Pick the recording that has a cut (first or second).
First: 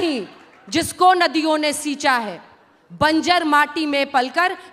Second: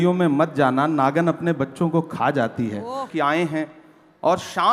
second